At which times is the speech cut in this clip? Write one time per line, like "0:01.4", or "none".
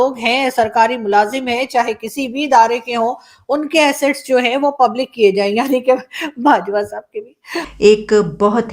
0:07.6